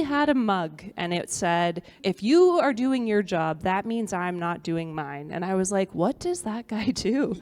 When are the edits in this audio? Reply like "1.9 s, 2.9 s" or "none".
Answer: 2.0 s